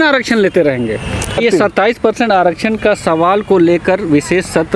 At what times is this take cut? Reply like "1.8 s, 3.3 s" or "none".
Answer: 1.4 s